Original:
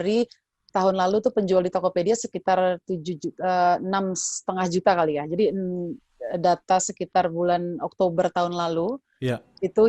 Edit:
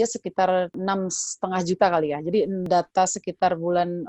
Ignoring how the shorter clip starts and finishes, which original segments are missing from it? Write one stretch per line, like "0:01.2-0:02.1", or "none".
0:02.9-0:03.8
0:05.7-0:06.4